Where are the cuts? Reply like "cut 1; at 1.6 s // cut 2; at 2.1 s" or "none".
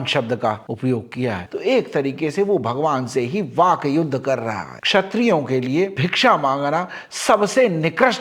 cut 1; at 1.4 s // cut 2; at 4.8 s

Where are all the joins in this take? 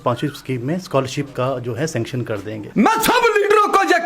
cut 1; at 2.6 s

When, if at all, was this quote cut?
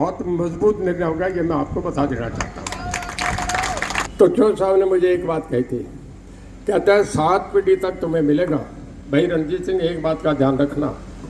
cut 1; at 4.1 s

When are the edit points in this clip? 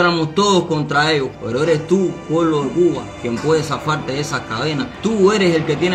cut 1; at 1.3 s // cut 2; at 4.9 s

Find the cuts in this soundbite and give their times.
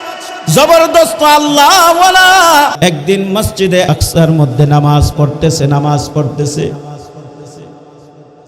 cut 1; at 2.7 s // cut 2; at 3.9 s

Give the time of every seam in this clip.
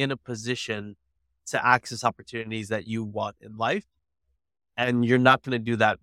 none

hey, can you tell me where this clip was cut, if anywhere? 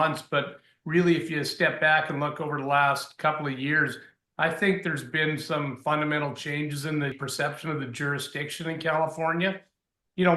cut 1; at 7.2 s

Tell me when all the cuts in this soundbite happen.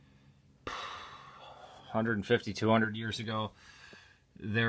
cut 1; at 3.2 s

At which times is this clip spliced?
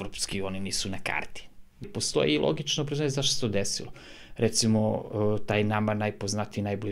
cut 1; at 1.9 s

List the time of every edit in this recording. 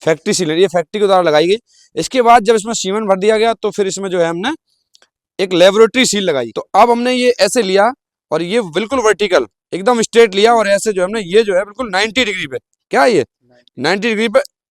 cut 1; at 6.5 s

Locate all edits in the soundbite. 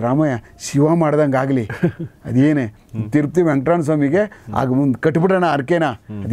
none

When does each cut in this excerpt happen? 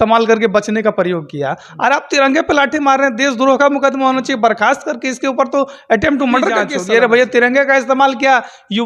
cut 1; at 6.7 s

